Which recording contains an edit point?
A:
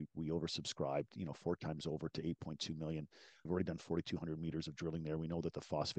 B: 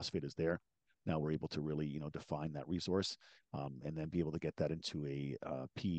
A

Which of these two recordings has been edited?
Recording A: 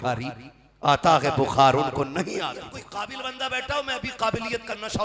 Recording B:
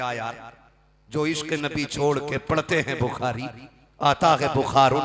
A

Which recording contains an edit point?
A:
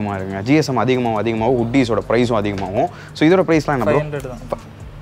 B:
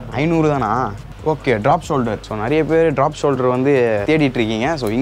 B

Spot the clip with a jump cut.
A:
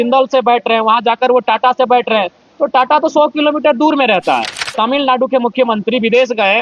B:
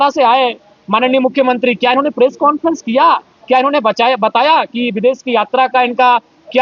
A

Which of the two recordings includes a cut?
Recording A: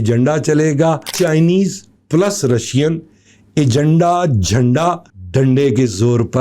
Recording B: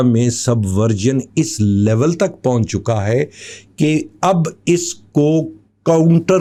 A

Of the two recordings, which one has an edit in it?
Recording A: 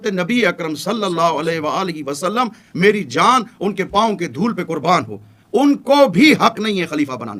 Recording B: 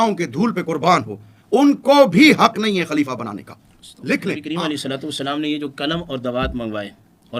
B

